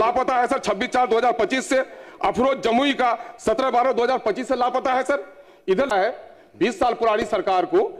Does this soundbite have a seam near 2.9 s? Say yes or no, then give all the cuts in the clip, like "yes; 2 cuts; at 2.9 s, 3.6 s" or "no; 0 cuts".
no; 1 cut; at 5.9 s